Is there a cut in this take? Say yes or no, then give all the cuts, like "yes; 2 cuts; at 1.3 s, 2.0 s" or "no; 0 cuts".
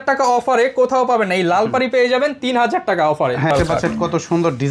yes; 1 cut; at 3.5 s